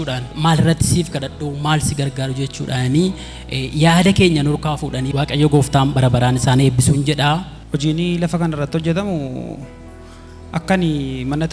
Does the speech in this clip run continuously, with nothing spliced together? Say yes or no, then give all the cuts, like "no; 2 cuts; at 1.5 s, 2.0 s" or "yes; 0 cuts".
no; 2 cuts; at 5.0 s, 7.6 s